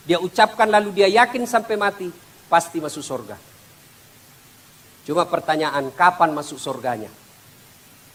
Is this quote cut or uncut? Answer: uncut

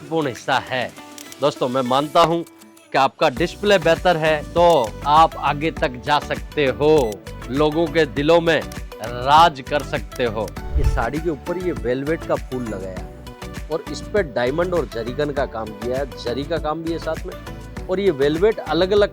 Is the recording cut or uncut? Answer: cut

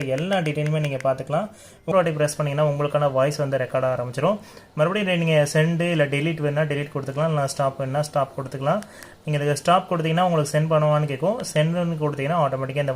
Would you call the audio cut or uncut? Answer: cut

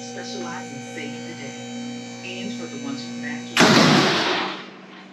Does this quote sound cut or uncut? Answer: uncut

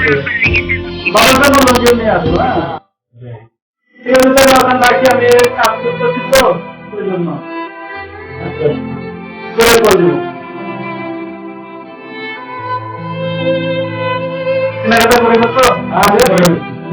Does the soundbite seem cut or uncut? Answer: uncut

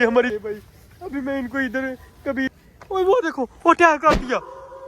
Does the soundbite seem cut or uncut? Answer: cut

